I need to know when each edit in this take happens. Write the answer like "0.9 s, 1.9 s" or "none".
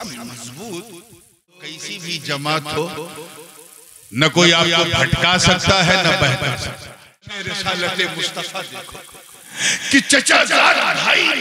1.8 s, 7.5 s